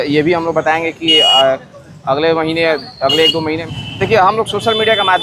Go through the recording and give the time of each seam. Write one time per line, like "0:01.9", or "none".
0:03.6